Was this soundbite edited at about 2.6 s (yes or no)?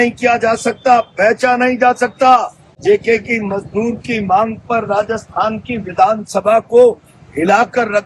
yes